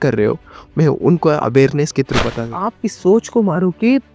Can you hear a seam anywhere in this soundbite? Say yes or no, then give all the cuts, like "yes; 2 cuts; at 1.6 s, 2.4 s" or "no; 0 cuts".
yes; 1 cut; at 2.6 s